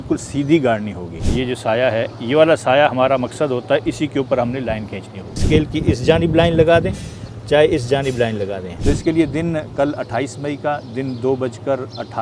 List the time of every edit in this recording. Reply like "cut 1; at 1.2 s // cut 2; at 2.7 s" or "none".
cut 1; at 1.2 s // cut 2; at 5.4 s // cut 3; at 8.7 s